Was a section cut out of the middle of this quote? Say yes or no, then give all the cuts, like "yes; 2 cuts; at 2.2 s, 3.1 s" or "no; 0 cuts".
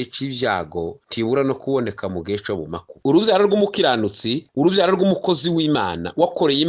yes; 1 cut; at 2.9 s